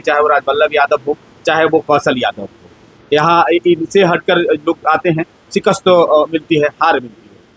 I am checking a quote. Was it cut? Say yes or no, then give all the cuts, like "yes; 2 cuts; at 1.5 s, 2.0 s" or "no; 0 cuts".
no; 0 cuts